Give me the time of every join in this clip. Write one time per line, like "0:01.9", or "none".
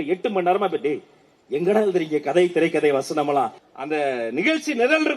0:03.6